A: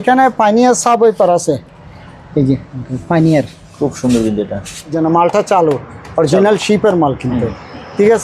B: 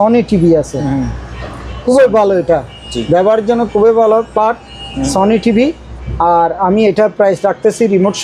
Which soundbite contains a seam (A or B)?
A